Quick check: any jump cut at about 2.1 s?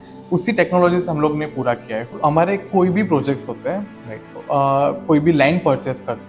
yes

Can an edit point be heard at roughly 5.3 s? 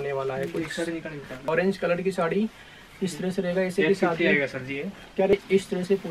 yes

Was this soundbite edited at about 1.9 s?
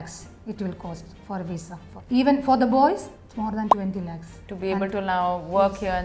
yes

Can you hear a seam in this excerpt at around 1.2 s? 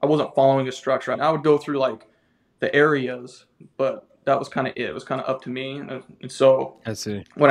yes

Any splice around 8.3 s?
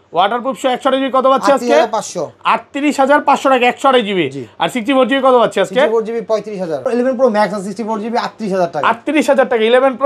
no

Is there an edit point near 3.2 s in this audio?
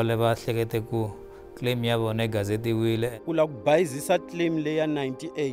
yes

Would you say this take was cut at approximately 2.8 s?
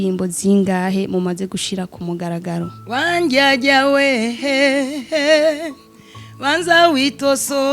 yes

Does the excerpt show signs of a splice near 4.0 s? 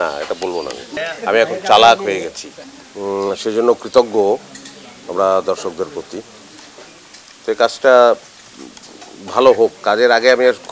no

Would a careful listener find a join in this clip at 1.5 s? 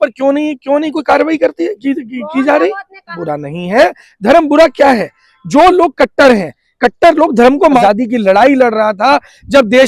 no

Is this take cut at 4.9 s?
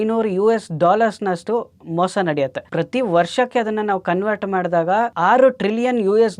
no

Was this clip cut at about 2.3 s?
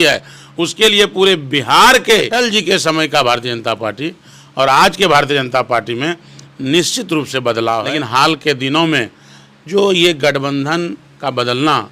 yes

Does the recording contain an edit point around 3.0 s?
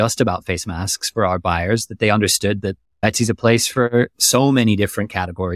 yes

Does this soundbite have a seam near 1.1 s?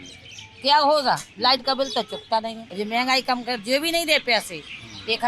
no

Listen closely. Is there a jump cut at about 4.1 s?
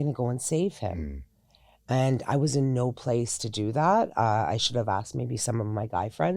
no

